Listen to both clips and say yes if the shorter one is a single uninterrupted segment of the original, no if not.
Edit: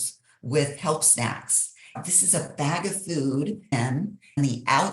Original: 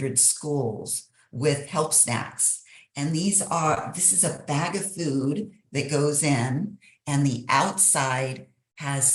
no